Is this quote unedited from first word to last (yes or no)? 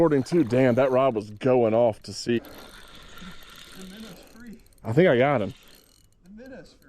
no